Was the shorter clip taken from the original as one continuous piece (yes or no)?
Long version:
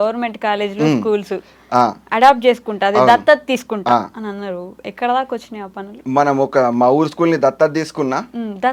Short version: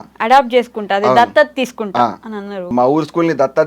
no